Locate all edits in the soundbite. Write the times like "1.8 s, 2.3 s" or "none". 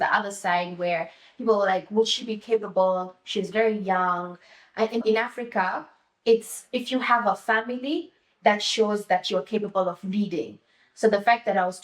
5.0 s